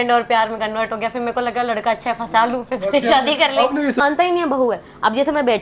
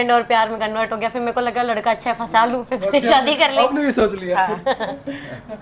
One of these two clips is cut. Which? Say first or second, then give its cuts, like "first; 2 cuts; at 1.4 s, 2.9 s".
first; 1 cut; at 4.0 s